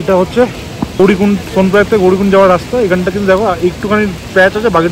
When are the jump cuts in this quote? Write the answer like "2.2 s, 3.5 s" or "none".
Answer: 1.0 s